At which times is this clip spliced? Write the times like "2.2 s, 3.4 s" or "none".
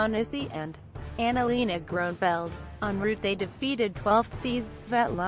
none